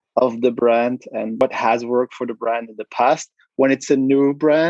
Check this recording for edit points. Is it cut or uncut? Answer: cut